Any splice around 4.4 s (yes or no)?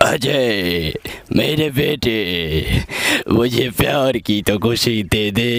no